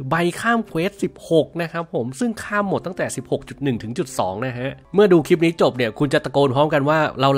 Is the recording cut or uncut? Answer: cut